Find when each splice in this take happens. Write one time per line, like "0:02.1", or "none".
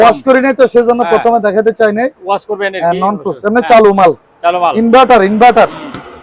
none